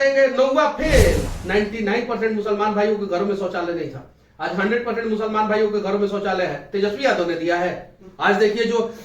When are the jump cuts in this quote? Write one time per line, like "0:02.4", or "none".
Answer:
0:01.4